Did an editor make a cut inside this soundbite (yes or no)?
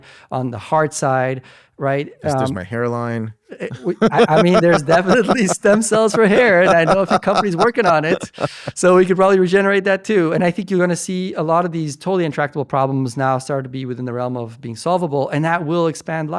no